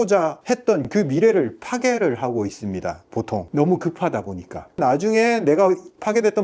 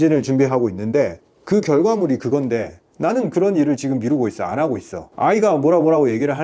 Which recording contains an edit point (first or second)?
first